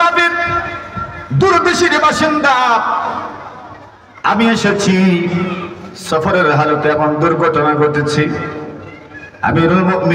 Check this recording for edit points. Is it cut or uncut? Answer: uncut